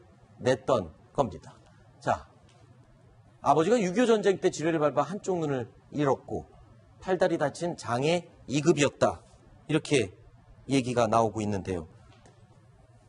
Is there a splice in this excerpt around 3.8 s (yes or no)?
yes